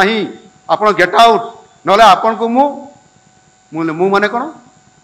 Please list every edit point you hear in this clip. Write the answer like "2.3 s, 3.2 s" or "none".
none